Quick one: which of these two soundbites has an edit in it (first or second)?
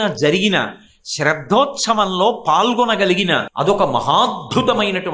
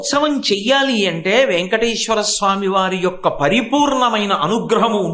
first